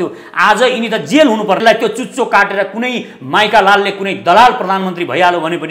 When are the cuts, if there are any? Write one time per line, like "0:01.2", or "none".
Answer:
0:01.6